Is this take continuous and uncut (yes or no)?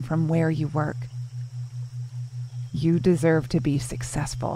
yes